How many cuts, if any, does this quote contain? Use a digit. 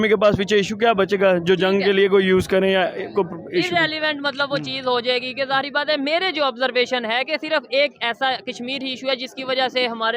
0